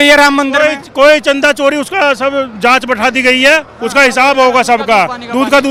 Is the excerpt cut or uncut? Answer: uncut